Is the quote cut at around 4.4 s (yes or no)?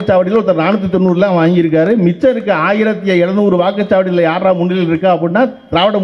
no